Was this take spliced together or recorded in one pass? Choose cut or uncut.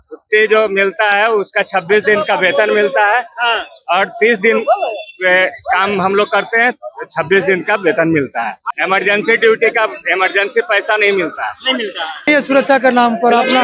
cut